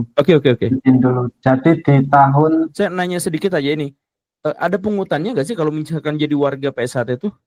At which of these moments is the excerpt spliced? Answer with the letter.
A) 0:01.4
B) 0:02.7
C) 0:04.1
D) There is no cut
B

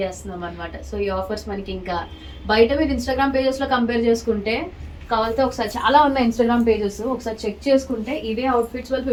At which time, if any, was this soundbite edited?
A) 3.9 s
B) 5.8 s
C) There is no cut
C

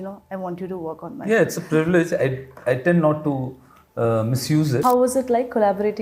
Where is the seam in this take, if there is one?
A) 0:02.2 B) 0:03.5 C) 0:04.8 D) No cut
C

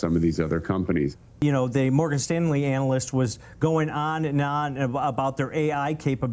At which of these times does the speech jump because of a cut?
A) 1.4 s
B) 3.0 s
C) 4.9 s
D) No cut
A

